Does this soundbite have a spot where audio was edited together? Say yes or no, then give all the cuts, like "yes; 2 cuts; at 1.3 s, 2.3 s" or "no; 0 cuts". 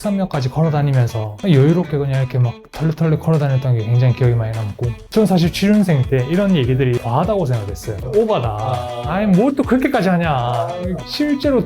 yes; 3 cuts; at 1.2 s, 4.9 s, 7.0 s